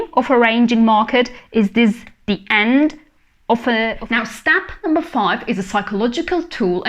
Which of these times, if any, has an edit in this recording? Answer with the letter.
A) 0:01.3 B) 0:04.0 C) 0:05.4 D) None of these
B